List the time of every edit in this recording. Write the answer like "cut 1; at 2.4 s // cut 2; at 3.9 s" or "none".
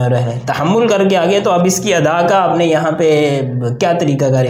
none